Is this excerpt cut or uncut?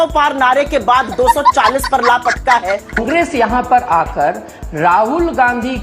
cut